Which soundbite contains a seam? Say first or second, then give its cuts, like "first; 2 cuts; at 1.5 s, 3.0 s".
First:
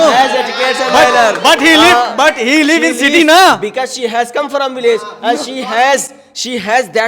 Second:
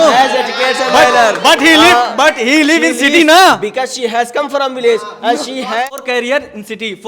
second; 1 cut; at 5.8 s